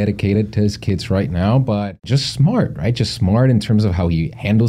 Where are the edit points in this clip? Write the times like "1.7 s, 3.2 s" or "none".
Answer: 2.1 s